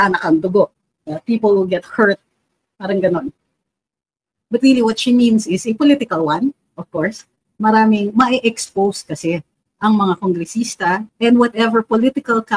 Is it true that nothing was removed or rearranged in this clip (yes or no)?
no